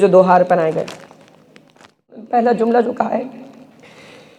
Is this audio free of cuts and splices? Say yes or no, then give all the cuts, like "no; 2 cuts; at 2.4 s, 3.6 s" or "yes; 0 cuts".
no; 1 cut; at 2.2 s